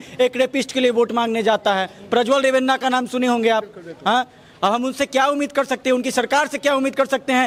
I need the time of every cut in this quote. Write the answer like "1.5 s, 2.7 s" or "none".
none